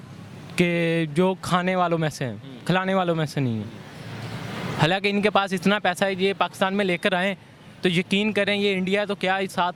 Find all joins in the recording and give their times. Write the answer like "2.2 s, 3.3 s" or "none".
none